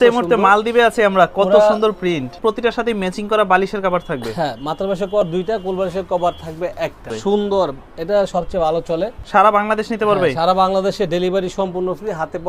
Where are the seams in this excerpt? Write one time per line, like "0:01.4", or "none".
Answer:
0:02.3
0:07.2
0:09.2